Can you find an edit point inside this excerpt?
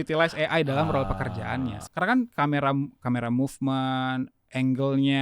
yes; 1 cut; at 1.8 s

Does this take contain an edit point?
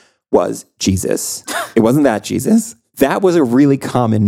no; 0 cuts

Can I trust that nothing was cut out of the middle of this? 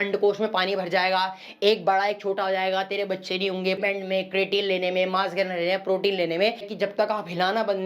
no; 2 cuts; at 3.8 s, 6.7 s

